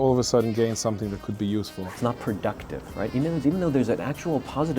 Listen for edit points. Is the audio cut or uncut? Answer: cut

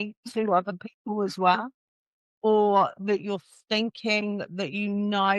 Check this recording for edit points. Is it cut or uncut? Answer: uncut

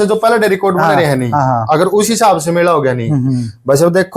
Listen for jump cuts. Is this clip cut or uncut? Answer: uncut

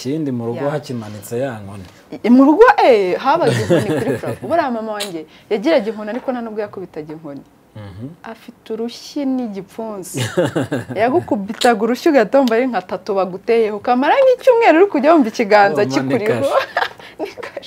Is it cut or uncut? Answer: uncut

